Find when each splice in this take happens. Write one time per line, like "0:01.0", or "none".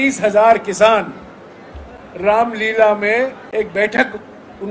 0:03.4